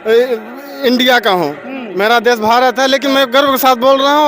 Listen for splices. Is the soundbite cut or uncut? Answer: uncut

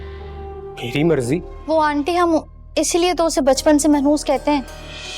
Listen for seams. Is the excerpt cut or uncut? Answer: cut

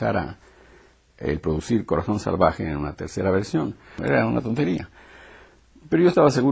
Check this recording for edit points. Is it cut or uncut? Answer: uncut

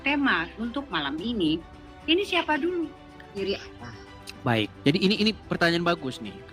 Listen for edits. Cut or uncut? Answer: cut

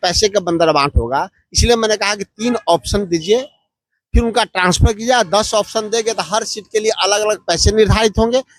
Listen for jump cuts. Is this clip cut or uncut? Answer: uncut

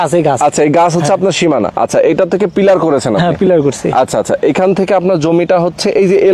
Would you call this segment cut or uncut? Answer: cut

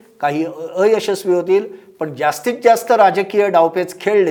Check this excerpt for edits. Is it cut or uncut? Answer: uncut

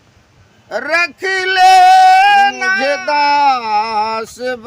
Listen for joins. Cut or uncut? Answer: cut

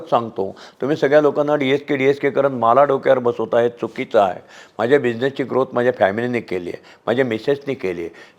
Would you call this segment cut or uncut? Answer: uncut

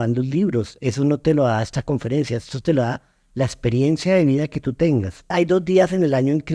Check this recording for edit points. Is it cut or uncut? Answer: cut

